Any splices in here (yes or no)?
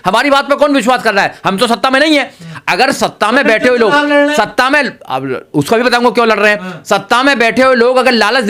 no